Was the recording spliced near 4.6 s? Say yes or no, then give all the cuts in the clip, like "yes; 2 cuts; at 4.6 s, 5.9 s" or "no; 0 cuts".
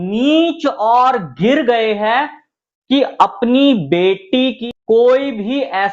yes; 1 cut; at 4.6 s